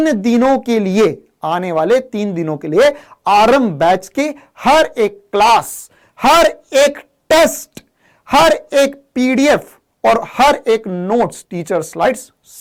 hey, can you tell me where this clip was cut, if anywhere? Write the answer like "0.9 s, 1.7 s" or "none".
none